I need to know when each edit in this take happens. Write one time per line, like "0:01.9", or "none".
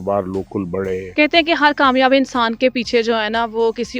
0:01.1